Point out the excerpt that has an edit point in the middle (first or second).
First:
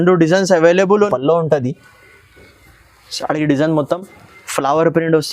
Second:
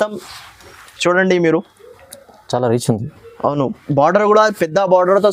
first